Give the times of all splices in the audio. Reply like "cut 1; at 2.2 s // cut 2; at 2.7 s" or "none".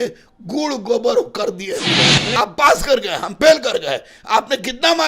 cut 1; at 2.2 s